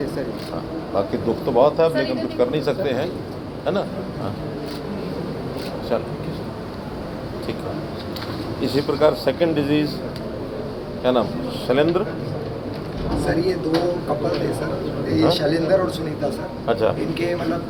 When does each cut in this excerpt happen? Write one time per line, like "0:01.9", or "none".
none